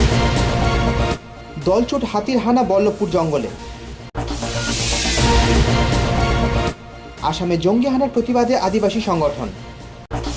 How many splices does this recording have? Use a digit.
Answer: 1